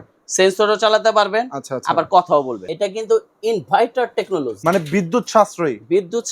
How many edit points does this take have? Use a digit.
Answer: 2